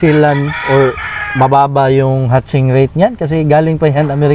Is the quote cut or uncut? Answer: uncut